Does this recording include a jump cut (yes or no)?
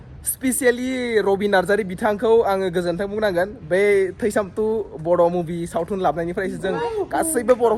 no